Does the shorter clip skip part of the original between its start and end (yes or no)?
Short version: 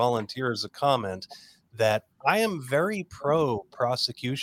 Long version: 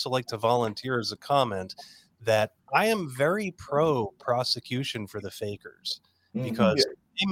no